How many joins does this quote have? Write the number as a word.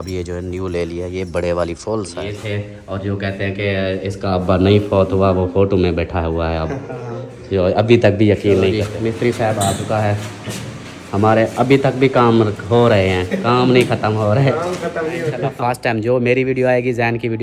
three